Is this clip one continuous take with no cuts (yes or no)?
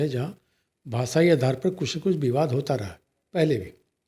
yes